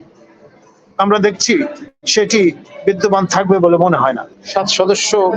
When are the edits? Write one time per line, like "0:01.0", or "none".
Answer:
0:04.3